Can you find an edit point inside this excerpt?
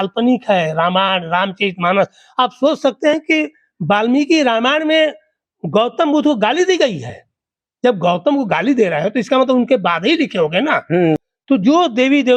yes; 1 cut; at 11.2 s

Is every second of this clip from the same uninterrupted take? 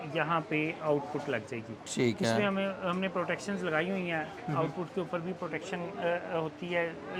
yes; 0 cuts

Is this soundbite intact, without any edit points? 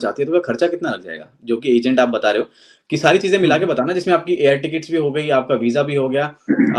yes; 0 cuts

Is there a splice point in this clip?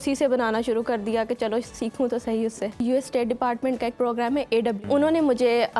yes; 2 cuts; at 2.8 s, 4.8 s

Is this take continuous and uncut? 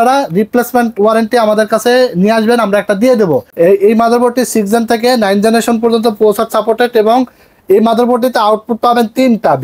no; 1 cut; at 3.5 s

